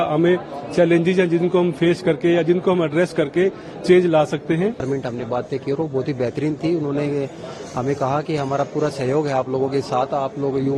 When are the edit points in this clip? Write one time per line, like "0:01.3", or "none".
0:04.8